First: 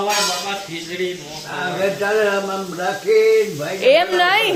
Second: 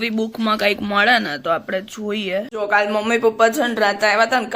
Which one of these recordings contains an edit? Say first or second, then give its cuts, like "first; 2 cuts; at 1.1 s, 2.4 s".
second; 1 cut; at 2.5 s